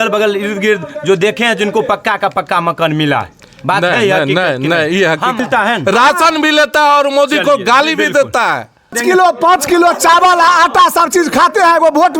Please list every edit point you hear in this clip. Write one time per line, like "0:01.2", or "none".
0:05.4
0:09.0